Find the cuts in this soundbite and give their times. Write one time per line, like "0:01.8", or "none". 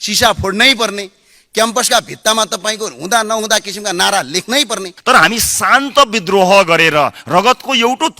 0:04.9